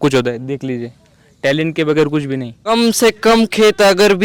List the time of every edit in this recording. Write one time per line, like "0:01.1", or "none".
0:02.7

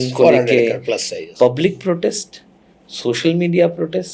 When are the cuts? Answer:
0:01.1

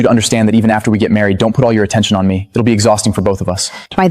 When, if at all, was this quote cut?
none

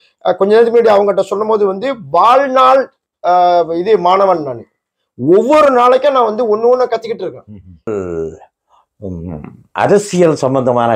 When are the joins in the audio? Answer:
0:07.9

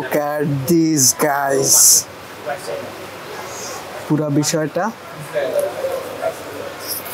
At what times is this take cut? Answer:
none

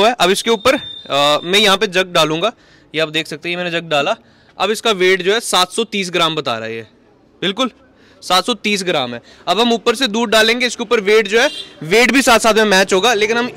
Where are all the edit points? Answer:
none

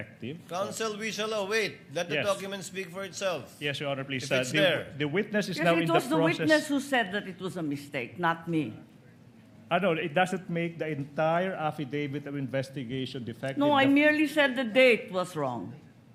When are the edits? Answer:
none

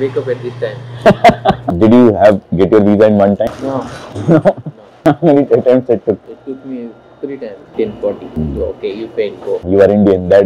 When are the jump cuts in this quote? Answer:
0:01.6
0:03.5
0:07.7

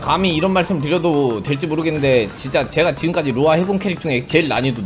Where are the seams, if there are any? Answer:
none

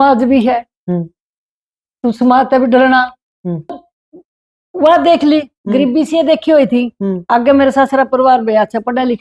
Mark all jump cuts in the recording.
0:03.9

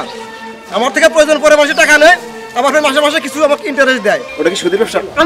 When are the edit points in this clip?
0:04.3

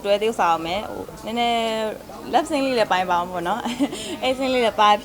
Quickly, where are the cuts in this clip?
none

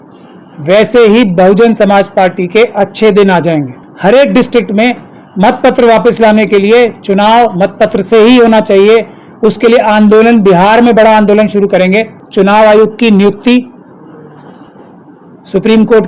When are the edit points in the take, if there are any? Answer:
0:03.8
0:12.2

